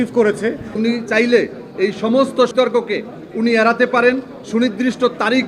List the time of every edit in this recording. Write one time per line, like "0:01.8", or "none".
0:00.8
0:02.5

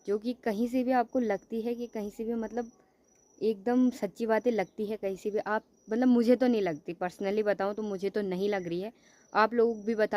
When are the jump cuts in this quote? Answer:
none

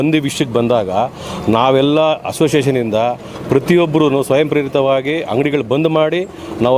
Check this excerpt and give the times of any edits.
none

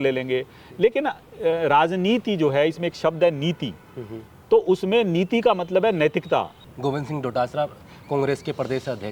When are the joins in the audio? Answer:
0:06.6

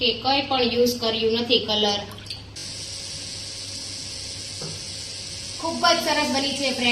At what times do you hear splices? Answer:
0:02.6

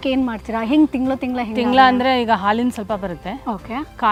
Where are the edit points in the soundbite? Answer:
none

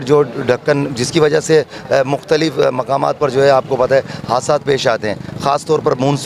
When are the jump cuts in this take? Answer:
none

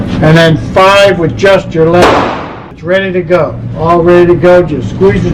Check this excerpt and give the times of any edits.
none

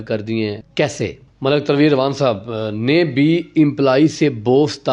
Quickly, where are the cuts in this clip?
0:01.2

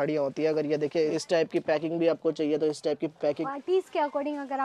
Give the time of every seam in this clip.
0:01.2
0:03.4

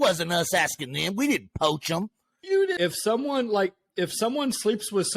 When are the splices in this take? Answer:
0:02.7

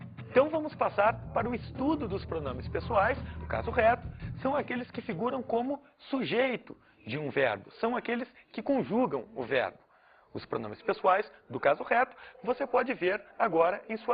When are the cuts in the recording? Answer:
0:02.2

